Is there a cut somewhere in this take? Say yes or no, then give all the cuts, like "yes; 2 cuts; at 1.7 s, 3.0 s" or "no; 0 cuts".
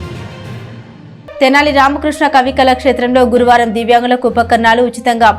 yes; 1 cut; at 1.4 s